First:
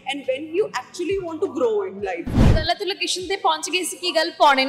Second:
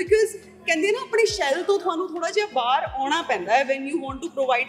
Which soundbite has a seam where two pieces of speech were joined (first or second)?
first